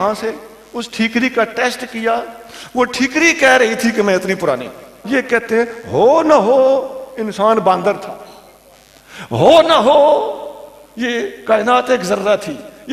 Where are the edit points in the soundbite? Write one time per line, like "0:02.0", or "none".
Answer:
0:05.0